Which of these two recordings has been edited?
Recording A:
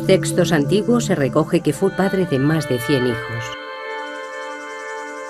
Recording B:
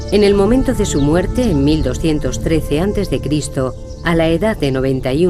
B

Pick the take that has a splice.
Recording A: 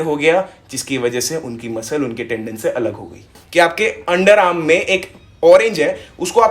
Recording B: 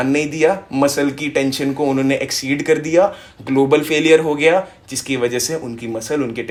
A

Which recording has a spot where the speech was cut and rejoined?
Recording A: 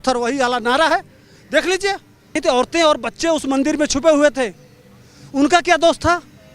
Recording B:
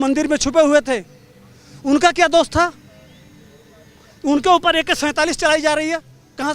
A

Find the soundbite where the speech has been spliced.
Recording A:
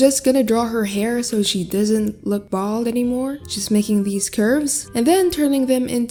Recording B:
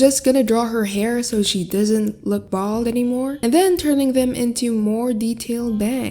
B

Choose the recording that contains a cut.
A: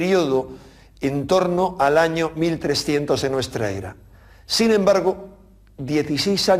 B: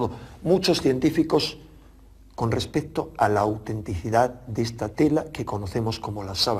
B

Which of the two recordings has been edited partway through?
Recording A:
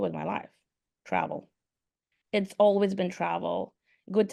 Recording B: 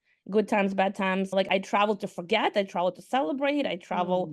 B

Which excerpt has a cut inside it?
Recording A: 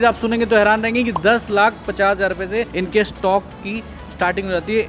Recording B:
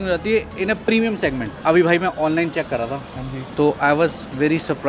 B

